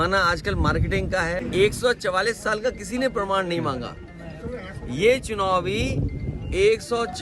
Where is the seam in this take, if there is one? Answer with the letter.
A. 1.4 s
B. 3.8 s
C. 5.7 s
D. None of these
A